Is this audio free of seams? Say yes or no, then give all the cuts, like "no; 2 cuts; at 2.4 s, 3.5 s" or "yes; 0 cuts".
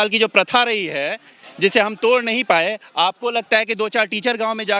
yes; 0 cuts